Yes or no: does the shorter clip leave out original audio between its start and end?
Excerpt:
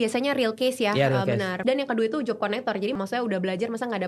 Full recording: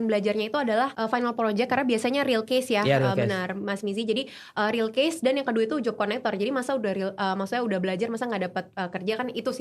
yes